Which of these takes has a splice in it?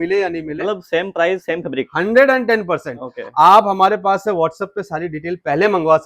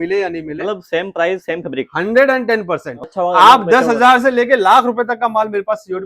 second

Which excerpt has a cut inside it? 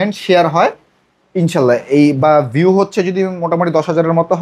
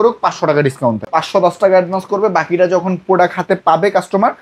second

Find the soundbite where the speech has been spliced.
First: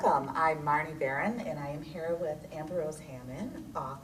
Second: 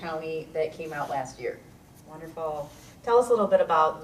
first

